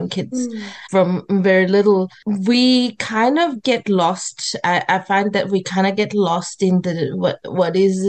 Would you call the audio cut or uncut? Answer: uncut